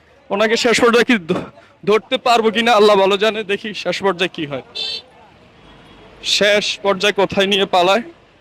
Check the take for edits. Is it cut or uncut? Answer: uncut